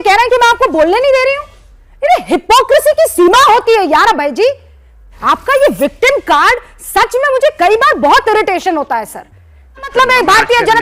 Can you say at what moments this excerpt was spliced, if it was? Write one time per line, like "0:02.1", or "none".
0:05.1
0:09.9

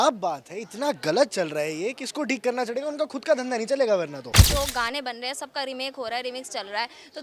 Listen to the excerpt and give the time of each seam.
0:04.4

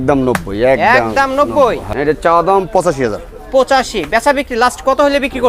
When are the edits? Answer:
0:01.9

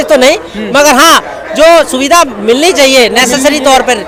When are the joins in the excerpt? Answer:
none

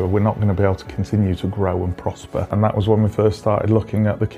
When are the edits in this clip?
0:02.5

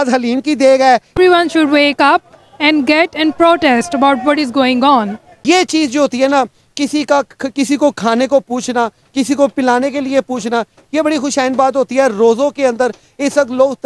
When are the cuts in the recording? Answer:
0:01.1
0:05.3

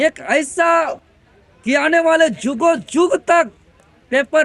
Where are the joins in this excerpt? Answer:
0:01.0

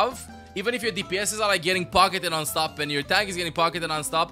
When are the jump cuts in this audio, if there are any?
none

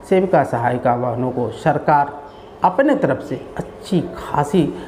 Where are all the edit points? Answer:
none

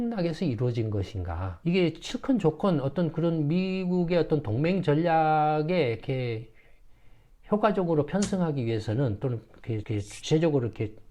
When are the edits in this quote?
0:01.4

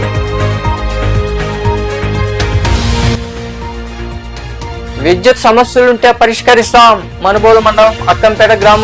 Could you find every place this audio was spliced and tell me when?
0:01.0

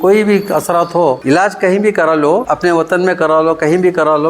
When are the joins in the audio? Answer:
0:01.2
0:02.5

